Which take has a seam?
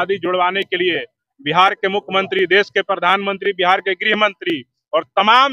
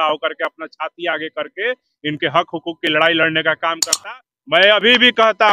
second; 1 cut; at 3.9 s

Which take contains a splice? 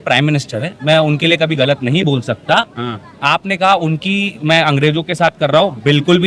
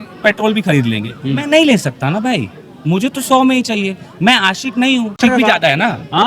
second; 1 cut; at 5.1 s

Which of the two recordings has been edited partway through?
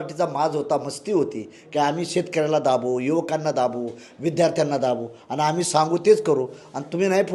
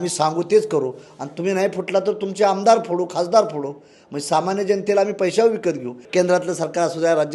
second; 1 cut; at 5.9 s

